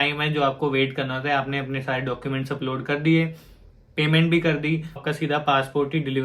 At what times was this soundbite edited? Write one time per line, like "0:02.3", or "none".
0:05.0